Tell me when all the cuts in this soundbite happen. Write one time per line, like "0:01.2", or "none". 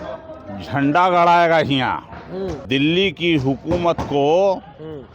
0:02.6